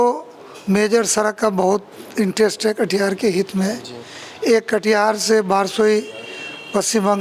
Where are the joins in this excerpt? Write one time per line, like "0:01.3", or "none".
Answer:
none